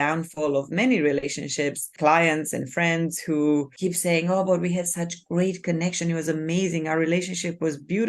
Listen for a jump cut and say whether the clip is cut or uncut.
cut